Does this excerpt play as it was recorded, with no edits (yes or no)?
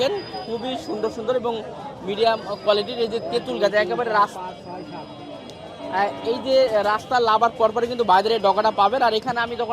yes